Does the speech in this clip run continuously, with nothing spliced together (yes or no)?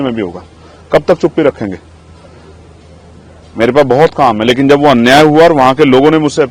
yes